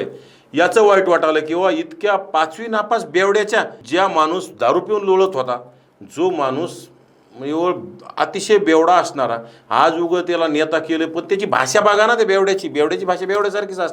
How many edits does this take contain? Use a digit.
1